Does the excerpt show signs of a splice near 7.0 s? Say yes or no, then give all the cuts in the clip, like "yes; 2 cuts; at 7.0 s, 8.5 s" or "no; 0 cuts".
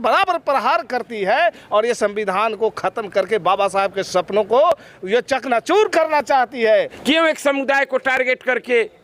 yes; 1 cut; at 7.0 s